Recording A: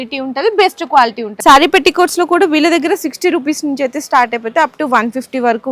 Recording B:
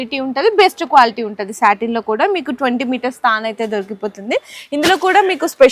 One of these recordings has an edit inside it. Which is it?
A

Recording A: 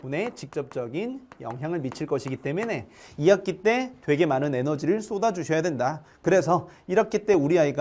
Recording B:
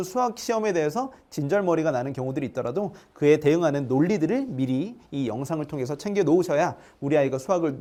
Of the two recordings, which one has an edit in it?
A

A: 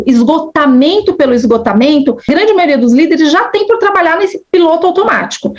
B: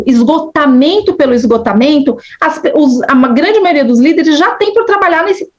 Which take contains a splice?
A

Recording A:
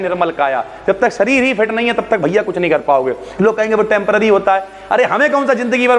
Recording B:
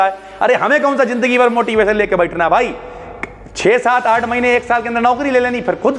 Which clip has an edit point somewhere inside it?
A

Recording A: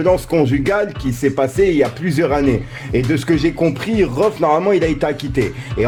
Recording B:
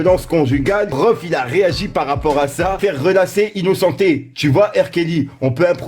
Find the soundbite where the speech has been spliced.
B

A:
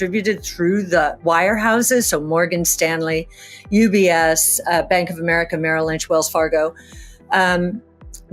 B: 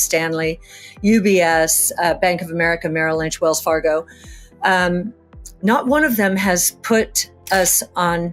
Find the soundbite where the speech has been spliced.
A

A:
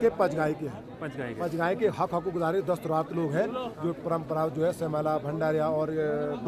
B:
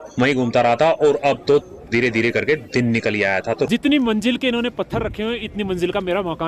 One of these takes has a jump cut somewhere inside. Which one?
B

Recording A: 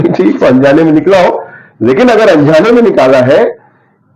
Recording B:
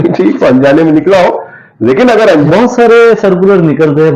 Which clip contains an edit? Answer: B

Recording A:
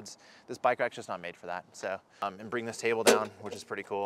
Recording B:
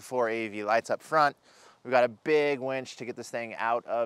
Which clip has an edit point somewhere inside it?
A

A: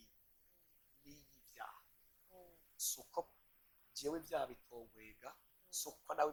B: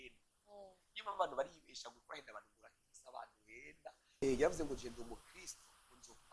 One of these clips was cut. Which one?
B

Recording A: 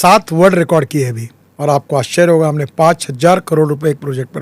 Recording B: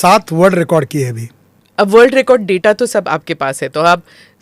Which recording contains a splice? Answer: A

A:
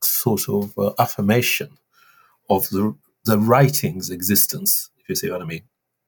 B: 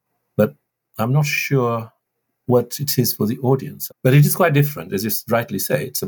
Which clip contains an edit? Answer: B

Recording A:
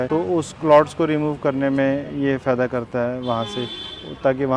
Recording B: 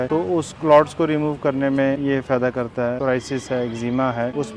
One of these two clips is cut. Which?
B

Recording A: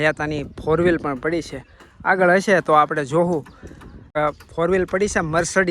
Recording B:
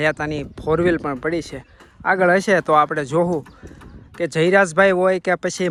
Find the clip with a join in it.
A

